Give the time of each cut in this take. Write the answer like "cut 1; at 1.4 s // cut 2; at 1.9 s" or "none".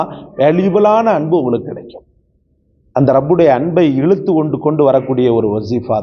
none